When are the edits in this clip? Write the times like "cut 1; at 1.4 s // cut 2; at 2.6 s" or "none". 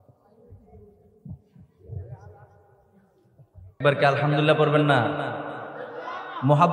cut 1; at 3.8 s